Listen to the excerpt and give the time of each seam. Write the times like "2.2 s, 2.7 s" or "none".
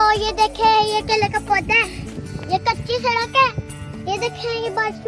2.0 s

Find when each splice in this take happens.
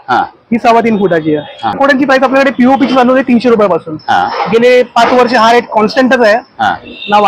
1.8 s

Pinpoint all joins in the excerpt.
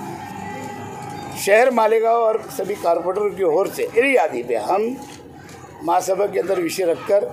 3.9 s

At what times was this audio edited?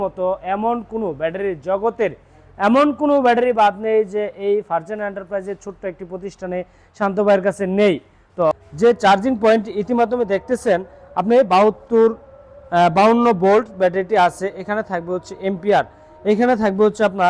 8.5 s

